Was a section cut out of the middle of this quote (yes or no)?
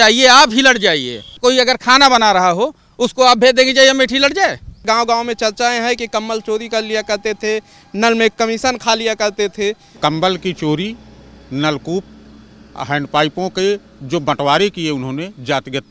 yes